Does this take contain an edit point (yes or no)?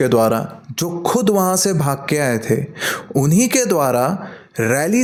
no